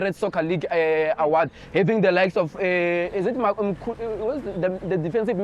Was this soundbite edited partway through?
no; 0 cuts

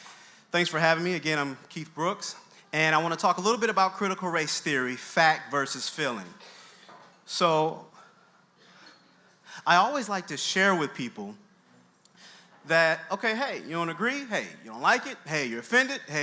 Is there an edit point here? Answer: yes; 1 cut; at 3.8 s

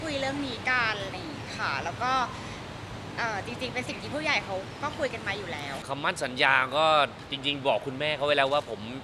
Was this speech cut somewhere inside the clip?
yes; 1 cut; at 5.8 s

